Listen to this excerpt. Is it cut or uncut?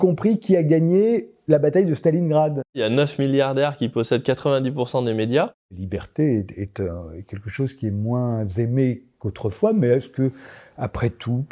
cut